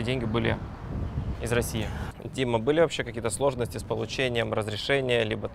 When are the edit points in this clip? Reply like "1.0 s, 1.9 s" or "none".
2.0 s